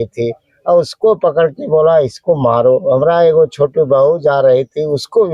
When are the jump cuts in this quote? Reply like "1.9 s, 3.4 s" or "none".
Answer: none